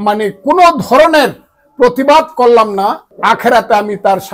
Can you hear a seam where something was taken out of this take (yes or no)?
yes